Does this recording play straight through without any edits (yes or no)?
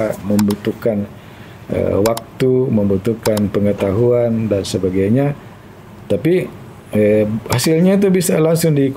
yes